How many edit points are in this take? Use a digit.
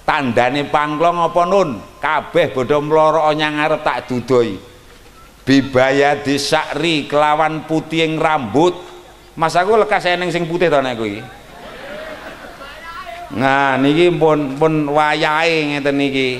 0